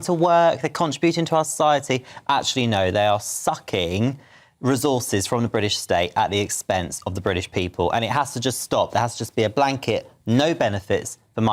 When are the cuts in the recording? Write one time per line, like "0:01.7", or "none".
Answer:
none